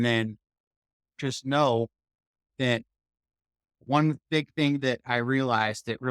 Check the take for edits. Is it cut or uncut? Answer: cut